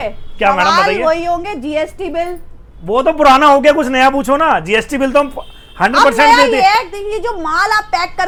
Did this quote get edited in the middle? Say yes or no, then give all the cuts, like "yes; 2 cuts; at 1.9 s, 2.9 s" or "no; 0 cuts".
no; 0 cuts